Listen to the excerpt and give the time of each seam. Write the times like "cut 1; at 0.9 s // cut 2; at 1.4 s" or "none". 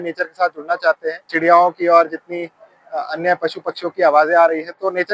cut 1; at 1.2 s

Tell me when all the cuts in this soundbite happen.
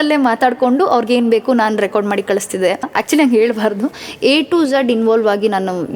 cut 1; at 2.9 s // cut 2; at 4.1 s

